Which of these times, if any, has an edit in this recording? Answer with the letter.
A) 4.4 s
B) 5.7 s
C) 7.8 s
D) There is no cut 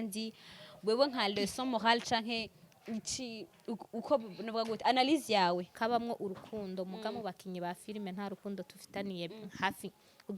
B